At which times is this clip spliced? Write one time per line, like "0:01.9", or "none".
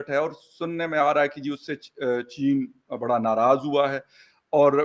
none